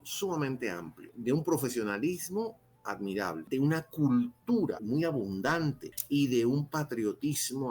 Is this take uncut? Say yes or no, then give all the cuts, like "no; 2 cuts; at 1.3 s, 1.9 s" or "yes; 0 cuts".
no; 4 cuts; at 1.1 s, 3.4 s, 4.8 s, 5.9 s